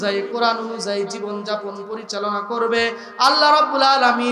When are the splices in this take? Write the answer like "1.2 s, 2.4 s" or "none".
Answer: none

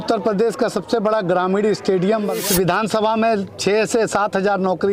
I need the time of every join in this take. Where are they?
2.4 s

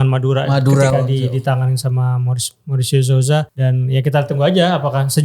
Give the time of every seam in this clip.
3.5 s

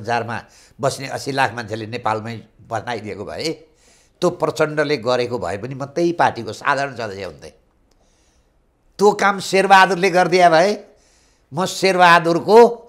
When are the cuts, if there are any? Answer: none

